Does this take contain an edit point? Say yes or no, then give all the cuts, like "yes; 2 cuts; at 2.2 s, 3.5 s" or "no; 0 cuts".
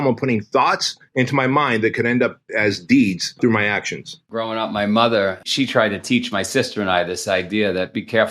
yes; 3 cuts; at 1.0 s, 3.8 s, 5.4 s